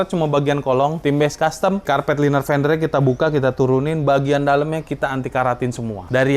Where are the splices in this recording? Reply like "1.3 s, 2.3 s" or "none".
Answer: 1.8 s